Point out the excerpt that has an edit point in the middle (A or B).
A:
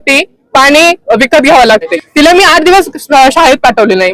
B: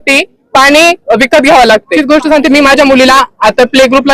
A